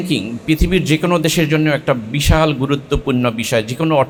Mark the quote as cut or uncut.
uncut